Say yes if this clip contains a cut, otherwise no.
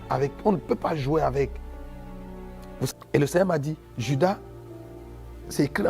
yes